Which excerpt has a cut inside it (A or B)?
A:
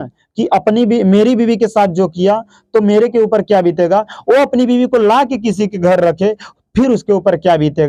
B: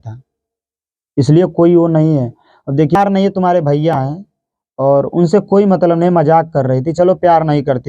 B